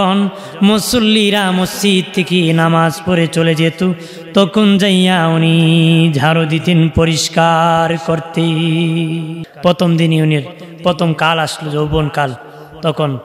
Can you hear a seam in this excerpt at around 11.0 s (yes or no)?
no